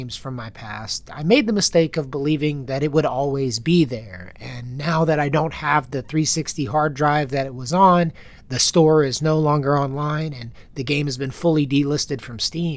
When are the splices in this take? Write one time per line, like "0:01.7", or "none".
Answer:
none